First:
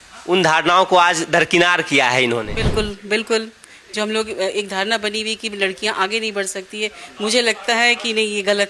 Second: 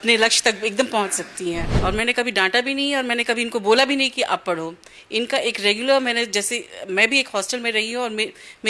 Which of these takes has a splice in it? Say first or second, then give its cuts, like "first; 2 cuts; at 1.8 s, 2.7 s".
second; 1 cut; at 1.7 s